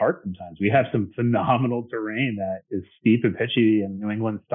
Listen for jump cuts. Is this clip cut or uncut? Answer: uncut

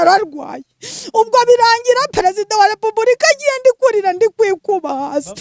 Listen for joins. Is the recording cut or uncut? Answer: uncut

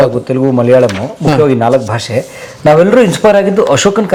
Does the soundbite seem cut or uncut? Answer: uncut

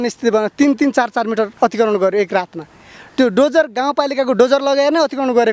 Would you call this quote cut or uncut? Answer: uncut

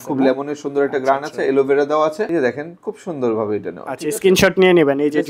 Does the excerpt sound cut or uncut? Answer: cut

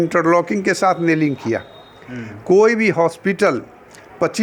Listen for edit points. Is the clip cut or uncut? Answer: uncut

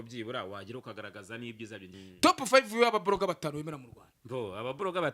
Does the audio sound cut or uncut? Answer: cut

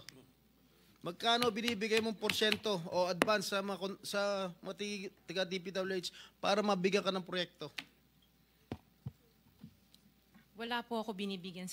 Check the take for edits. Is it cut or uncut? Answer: uncut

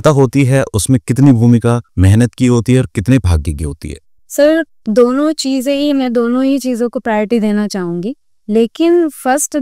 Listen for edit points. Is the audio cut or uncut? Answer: uncut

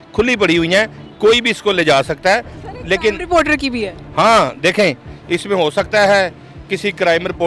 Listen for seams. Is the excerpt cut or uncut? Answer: uncut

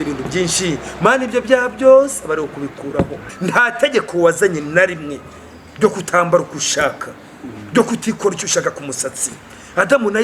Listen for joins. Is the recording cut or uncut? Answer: cut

